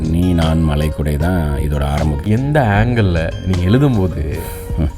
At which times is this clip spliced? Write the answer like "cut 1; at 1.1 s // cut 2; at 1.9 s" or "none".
cut 1; at 2.2 s